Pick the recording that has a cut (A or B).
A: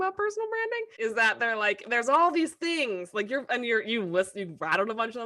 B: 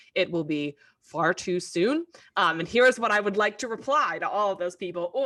A